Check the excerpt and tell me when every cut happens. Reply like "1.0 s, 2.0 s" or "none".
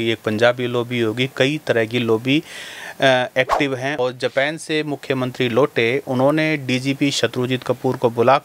4.0 s